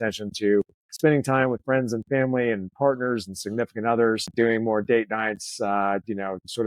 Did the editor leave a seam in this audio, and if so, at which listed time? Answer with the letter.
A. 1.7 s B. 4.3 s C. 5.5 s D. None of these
B